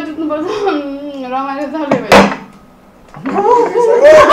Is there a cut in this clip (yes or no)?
no